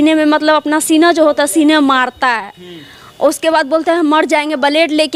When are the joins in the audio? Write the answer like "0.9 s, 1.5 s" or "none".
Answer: none